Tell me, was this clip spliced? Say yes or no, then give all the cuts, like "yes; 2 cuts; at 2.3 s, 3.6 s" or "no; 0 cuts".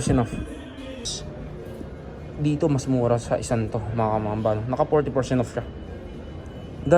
yes; 1 cut; at 1.2 s